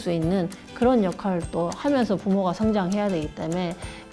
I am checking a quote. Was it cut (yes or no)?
no